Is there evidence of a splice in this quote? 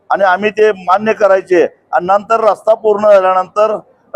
no; 0 cuts

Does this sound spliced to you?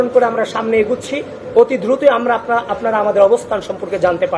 no; 0 cuts

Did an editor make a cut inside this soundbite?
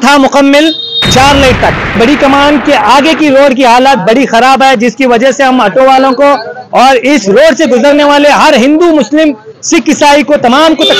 yes; 1 cut; at 2.0 s

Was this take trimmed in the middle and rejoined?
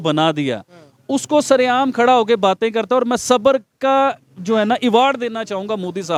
no; 0 cuts

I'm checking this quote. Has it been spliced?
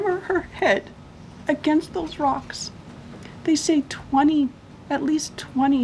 no; 0 cuts

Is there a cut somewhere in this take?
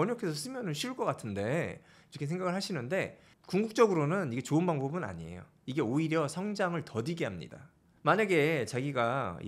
no; 0 cuts

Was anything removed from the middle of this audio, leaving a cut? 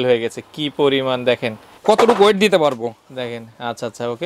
yes; 1 cut; at 1.7 s

